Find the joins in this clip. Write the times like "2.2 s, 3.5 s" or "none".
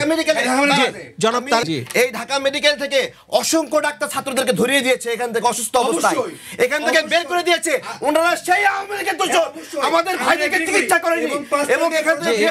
1.6 s